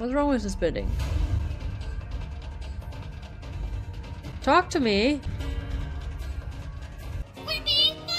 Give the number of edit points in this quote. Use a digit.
3